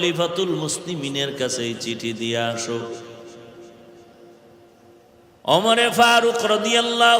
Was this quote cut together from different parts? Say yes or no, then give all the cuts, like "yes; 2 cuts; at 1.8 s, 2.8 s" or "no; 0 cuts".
no; 0 cuts